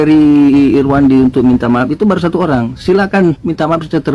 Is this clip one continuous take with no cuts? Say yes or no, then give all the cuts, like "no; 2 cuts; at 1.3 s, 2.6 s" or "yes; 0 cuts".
yes; 0 cuts